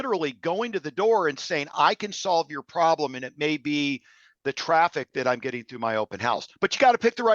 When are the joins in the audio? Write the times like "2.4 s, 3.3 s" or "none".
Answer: none